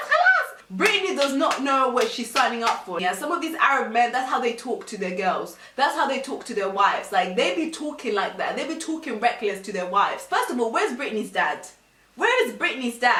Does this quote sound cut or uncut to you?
uncut